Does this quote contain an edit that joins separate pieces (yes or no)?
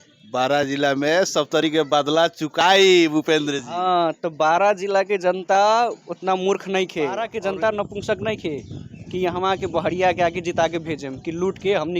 yes